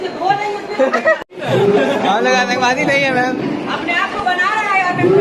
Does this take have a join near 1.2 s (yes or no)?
yes